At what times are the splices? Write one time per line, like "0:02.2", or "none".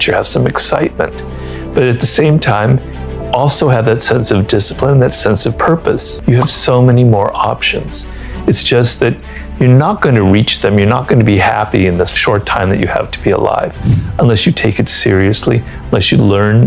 0:06.1
0:12.1